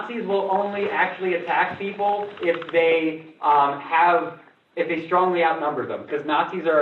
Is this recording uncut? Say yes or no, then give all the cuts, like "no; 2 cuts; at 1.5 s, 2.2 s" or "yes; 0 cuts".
yes; 0 cuts